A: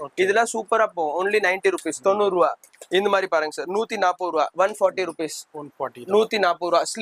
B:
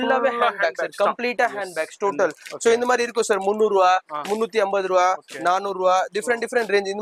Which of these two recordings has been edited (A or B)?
A